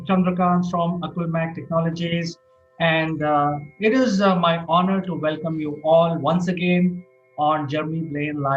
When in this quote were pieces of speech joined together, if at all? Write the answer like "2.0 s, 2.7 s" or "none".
1.9 s